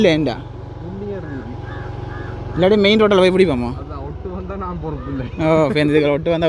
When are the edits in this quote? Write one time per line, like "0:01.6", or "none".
none